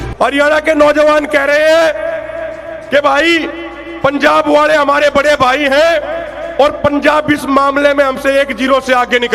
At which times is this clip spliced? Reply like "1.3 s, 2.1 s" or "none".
none